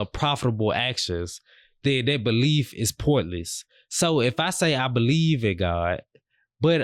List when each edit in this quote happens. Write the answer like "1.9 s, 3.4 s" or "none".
none